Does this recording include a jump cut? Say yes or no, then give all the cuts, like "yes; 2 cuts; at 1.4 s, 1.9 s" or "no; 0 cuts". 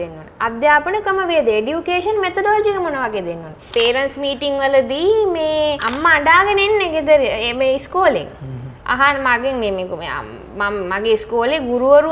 yes; 2 cuts; at 3.6 s, 5.9 s